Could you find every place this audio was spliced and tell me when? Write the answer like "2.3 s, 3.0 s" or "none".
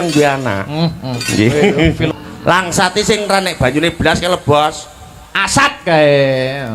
2.1 s